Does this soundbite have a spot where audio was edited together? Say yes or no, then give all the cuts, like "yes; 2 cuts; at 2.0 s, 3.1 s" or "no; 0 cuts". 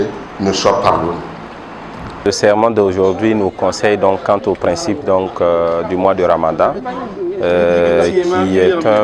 yes; 1 cut; at 2.2 s